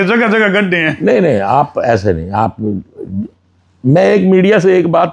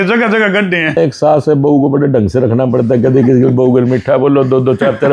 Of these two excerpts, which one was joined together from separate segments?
second; 1 cut; at 1.0 s

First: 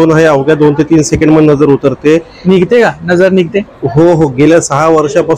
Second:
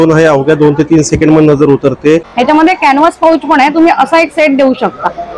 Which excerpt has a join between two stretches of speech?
second; 1 cut; at 2.3 s

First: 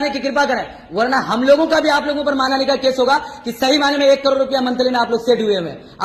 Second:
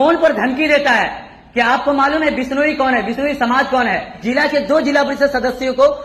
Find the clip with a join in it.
second; 1 cut; at 4.1 s

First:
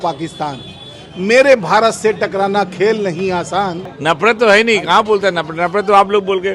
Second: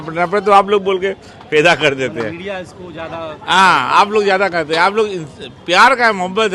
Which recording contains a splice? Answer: first; 1 cut; at 3.9 s

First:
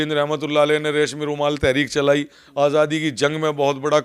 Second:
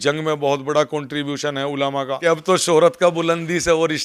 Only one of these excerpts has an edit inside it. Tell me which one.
second; 1 cut; at 2.1 s

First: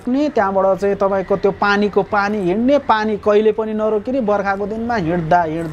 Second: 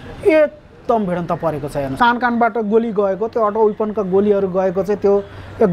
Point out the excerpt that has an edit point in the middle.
second; 1 cut; at 1.9 s

